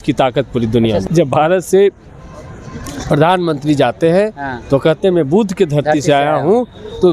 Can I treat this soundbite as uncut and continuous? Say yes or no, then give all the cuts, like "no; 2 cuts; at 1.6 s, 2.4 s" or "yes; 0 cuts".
no; 1 cut; at 1.0 s